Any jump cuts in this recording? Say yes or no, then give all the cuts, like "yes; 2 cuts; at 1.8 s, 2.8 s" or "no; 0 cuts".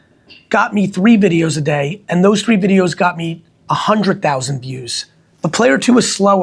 no; 0 cuts